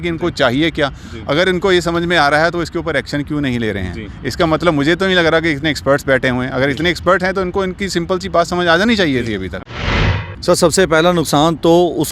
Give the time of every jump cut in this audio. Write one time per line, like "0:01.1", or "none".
0:09.8